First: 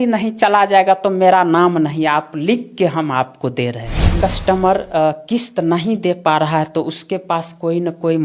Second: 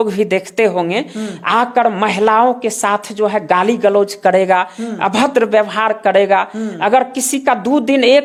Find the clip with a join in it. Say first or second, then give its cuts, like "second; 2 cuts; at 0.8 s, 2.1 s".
first; 1 cut; at 4.1 s